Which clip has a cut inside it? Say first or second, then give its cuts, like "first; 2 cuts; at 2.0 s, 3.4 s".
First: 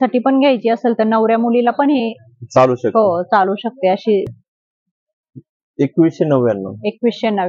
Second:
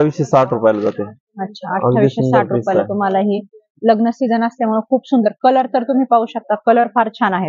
first; 1 cut; at 4.3 s